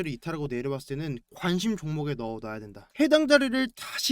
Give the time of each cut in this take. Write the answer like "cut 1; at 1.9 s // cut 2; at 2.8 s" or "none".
cut 1; at 1.3 s // cut 2; at 2.9 s